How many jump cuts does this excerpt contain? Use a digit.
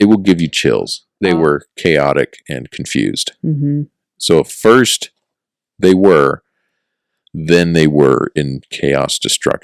1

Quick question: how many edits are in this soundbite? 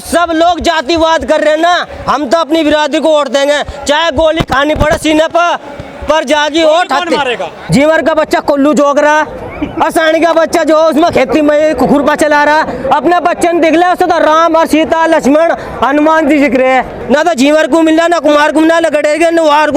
2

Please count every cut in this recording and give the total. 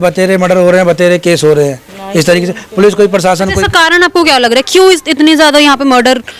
0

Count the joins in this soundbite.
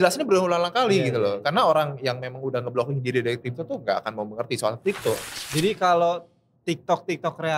1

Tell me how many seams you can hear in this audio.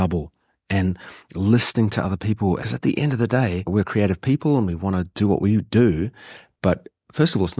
1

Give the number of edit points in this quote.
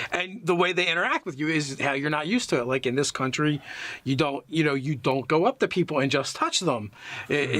0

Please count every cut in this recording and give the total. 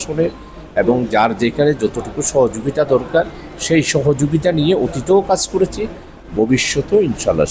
0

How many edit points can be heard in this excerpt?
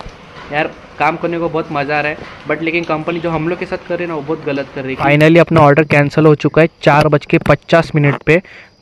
1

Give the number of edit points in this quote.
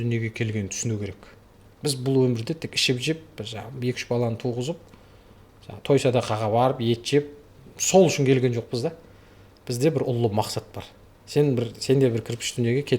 0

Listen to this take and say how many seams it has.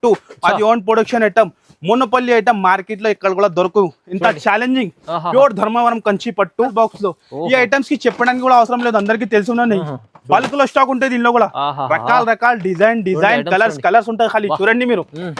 1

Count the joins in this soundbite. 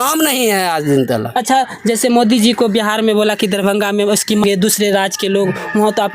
1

